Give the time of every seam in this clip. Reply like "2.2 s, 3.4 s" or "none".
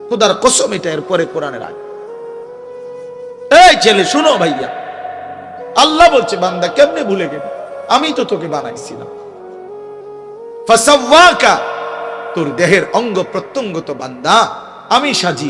1.7 s, 3.6 s, 9.0 s, 10.7 s